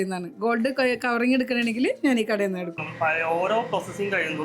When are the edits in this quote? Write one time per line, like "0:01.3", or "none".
0:02.7